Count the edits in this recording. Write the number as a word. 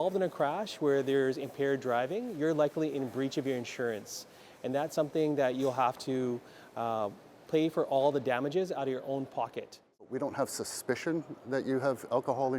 one